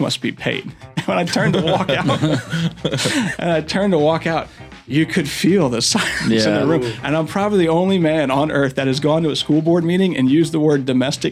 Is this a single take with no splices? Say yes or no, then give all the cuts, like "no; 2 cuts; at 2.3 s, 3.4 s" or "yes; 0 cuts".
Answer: yes; 0 cuts